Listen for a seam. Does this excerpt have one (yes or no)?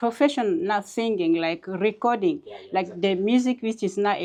no